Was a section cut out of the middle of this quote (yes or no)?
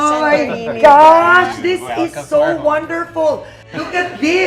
yes